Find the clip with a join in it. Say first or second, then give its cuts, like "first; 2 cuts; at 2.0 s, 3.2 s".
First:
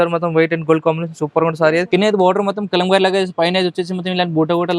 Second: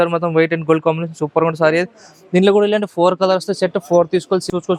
first; 1 cut; at 1.9 s